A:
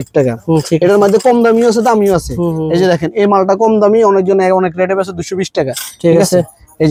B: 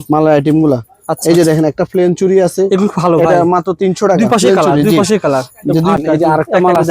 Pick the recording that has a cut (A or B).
B